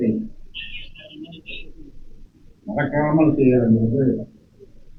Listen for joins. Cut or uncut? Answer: uncut